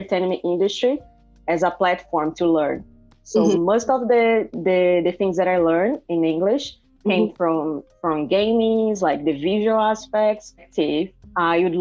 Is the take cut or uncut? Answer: cut